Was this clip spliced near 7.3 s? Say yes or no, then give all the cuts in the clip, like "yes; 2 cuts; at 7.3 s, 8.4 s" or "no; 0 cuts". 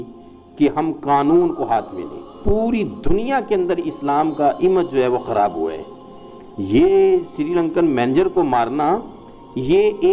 no; 1 cut; at 2.4 s